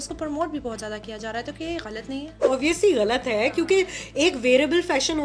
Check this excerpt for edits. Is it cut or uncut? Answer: cut